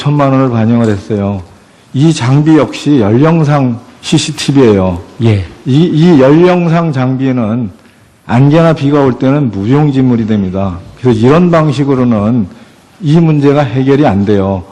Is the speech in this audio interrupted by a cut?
no; 0 cuts

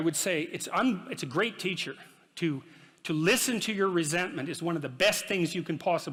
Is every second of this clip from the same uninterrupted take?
yes; 0 cuts

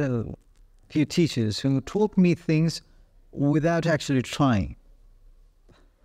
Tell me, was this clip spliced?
no; 0 cuts

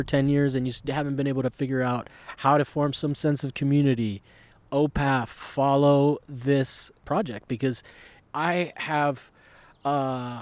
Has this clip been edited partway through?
yes; 2 cuts; at 7.0 s, 8.1 s

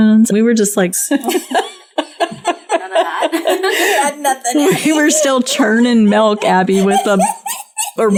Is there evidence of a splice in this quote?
no; 0 cuts

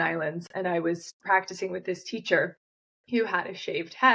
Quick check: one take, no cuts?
no; 1 cut; at 1.1 s

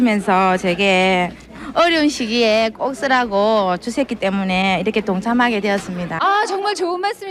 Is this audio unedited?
no; 1 cut; at 6.1 s

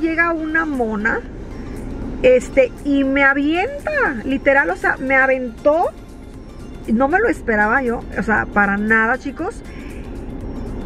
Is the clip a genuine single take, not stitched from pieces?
yes; 0 cuts

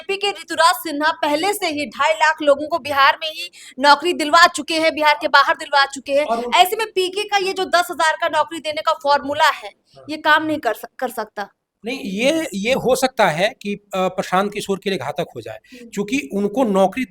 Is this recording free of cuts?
yes; 0 cuts

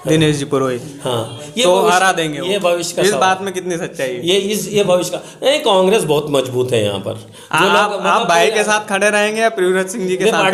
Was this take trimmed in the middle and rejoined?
no; 0 cuts

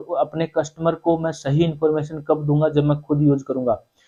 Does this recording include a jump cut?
no; 0 cuts

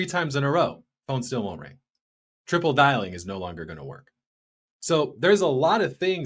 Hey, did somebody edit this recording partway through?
no; 0 cuts

